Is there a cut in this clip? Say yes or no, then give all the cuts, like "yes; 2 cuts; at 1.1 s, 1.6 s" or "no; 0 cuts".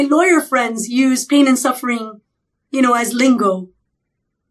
no; 0 cuts